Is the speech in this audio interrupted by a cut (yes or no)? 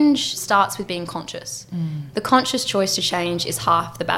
no